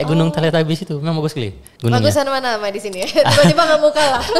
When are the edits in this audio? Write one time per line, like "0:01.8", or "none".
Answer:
none